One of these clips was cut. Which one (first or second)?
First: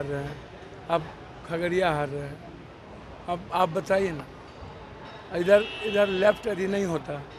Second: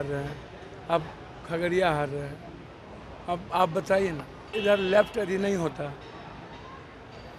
second